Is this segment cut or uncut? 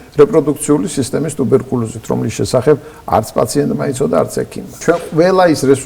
cut